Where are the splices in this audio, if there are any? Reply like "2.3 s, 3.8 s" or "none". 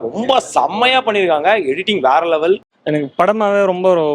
2.7 s